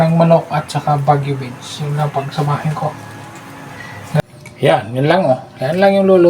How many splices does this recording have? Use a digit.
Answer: 1